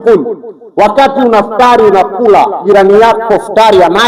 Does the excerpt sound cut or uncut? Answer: uncut